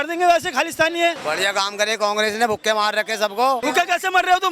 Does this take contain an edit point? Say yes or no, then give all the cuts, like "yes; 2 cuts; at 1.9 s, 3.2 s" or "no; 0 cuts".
yes; 2 cuts; at 1.2 s, 3.6 s